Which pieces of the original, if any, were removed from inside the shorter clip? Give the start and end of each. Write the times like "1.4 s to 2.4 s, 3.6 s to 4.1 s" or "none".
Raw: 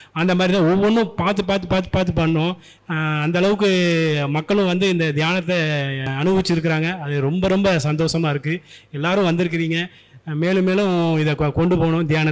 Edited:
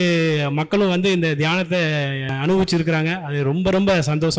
none